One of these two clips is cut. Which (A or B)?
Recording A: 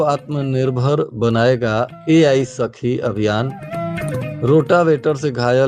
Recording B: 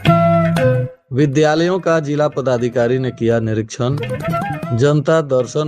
B